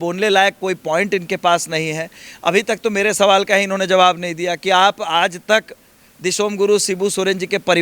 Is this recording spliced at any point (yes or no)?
no